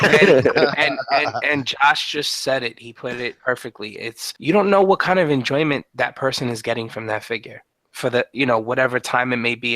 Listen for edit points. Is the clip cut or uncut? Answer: cut